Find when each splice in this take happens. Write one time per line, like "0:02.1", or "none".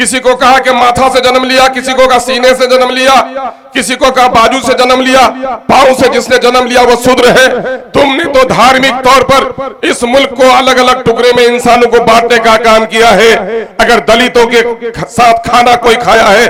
none